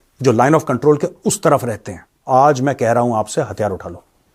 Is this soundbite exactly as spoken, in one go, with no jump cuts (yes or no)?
no